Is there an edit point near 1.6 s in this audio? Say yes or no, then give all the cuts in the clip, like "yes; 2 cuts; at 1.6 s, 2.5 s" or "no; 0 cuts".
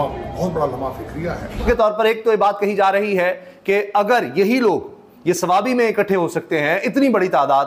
yes; 1 cut; at 1.6 s